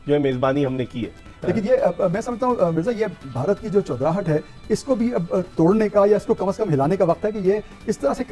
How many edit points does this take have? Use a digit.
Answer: 1